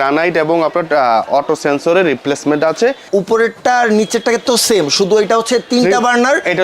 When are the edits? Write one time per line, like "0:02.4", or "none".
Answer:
0:03.0